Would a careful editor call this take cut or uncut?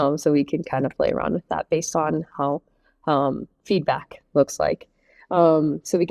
uncut